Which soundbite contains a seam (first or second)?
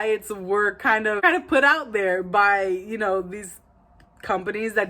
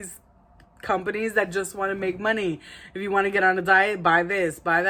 first